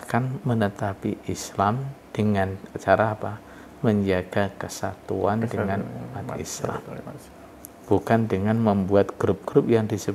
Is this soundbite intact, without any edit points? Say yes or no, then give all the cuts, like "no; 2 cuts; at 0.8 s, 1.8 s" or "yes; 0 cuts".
yes; 0 cuts